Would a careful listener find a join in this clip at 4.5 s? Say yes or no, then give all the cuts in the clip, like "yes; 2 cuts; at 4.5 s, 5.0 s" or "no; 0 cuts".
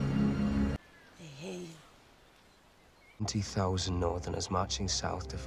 no; 0 cuts